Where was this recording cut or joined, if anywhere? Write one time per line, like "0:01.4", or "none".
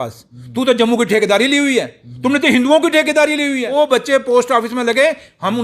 0:03.7